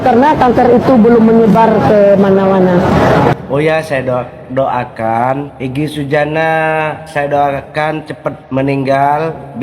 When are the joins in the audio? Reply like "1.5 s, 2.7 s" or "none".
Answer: 3.3 s, 5.5 s, 7.0 s, 8.4 s